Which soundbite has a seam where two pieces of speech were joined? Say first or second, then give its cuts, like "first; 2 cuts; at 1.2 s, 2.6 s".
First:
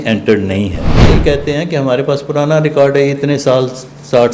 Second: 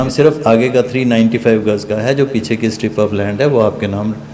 first; 1 cut; at 1.0 s